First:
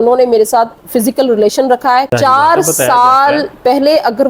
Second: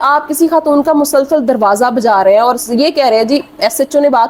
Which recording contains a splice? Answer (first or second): first